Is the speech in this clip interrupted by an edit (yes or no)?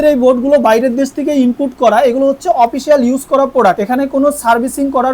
no